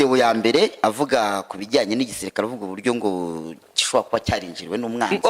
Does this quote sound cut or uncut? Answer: uncut